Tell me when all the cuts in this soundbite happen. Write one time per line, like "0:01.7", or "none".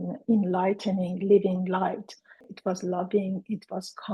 0:02.5